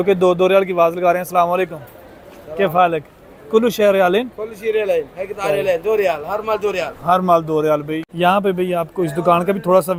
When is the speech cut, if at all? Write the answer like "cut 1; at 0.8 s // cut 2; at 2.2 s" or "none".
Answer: none

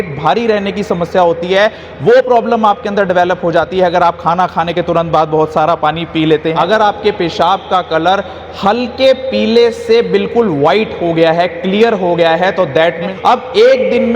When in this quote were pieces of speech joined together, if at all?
cut 1; at 6.5 s // cut 2; at 13.1 s

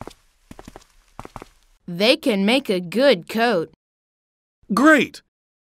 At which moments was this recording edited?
cut 1; at 1.6 s

